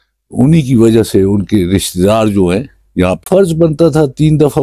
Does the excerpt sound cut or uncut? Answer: cut